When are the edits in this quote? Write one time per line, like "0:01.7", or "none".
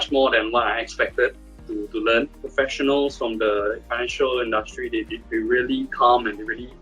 0:02.4
0:03.8